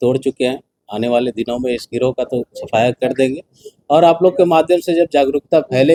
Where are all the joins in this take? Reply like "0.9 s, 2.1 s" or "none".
none